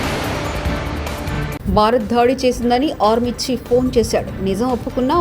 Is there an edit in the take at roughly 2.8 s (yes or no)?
no